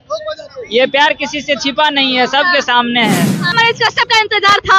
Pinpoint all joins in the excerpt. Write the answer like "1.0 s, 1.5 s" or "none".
3.5 s